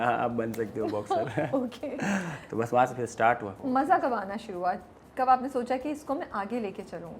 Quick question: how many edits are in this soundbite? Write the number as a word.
zero